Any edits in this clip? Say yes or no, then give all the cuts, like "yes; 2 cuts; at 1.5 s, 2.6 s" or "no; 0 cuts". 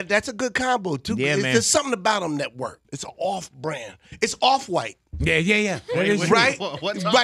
yes; 1 cut; at 2.8 s